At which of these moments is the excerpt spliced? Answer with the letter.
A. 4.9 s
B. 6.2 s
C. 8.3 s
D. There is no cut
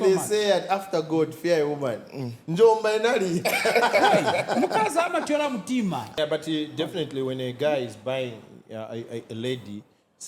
B